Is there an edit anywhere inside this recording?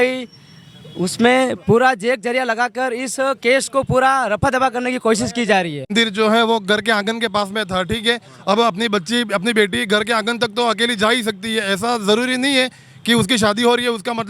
yes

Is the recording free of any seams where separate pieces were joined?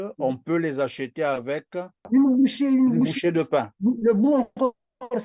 no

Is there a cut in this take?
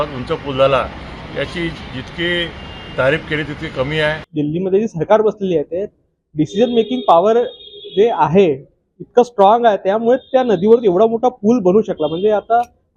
yes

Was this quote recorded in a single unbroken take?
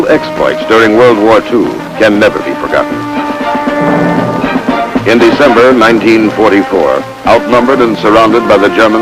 yes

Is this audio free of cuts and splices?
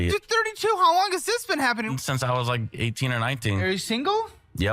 no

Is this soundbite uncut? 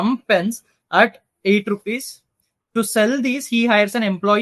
yes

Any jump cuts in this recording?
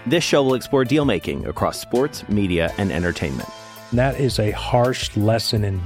no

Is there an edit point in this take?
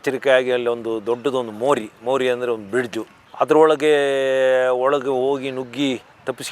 yes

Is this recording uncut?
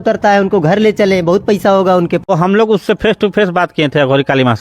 no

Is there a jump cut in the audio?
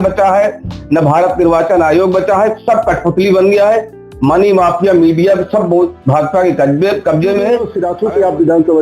yes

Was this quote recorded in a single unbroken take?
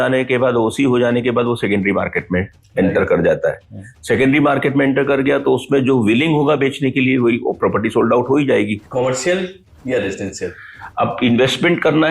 no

